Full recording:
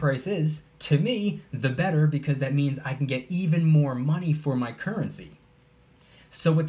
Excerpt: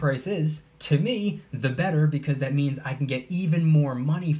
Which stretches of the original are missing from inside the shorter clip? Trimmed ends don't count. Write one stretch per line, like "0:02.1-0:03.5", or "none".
none